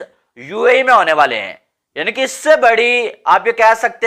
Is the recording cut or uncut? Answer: uncut